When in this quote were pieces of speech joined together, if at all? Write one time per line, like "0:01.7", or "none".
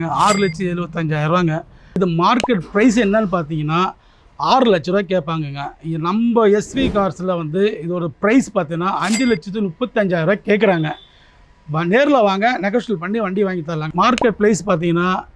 0:01.8
0:13.8